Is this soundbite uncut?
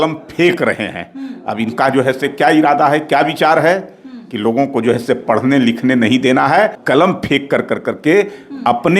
no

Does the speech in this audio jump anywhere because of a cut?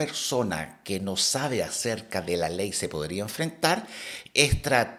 no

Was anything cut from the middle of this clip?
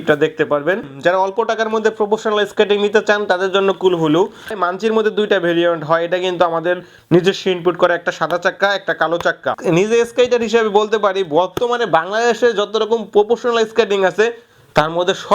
yes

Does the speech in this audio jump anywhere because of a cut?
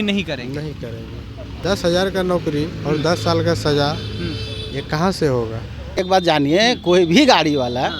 yes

